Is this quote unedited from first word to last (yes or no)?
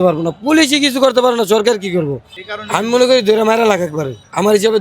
no